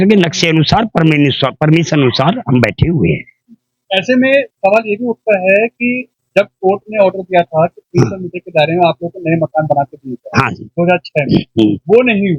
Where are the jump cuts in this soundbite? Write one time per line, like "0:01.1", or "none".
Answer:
none